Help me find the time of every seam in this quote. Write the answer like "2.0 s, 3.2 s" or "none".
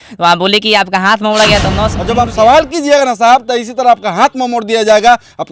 2.0 s